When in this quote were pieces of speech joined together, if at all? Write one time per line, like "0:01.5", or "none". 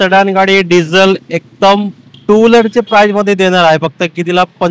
none